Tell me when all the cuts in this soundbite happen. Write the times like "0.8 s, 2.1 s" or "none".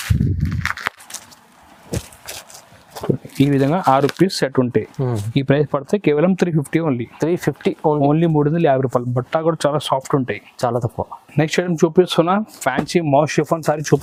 none